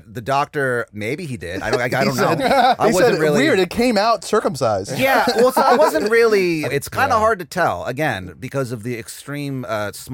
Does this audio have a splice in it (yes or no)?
yes